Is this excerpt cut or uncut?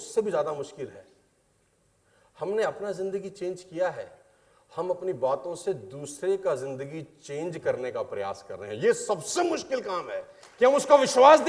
uncut